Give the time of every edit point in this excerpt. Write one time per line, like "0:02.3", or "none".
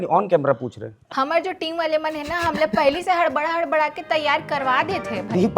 0:01.0